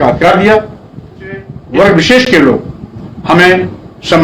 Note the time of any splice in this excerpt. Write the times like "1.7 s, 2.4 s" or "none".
1.6 s